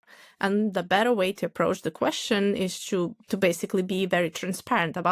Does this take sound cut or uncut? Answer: uncut